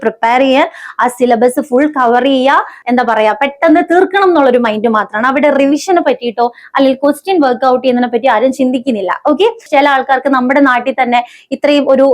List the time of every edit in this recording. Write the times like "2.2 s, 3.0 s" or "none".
2.8 s, 9.6 s